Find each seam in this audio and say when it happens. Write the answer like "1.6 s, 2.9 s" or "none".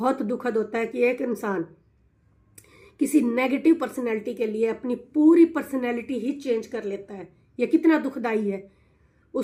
none